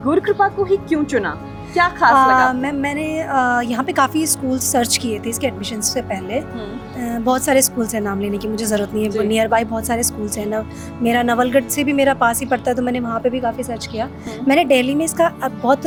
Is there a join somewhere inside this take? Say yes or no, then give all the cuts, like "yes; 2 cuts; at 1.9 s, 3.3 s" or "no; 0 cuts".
no; 0 cuts